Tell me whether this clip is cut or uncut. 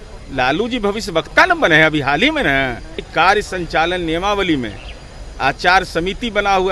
cut